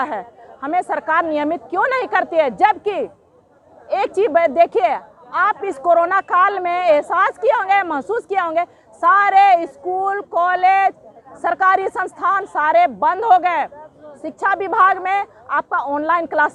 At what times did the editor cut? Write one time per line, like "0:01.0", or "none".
none